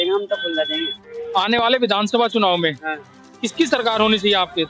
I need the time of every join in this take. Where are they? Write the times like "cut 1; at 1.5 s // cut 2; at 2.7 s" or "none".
cut 1; at 1.1 s